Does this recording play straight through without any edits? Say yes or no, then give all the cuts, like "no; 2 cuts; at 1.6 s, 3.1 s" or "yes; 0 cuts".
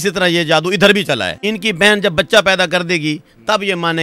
no; 1 cut; at 1.3 s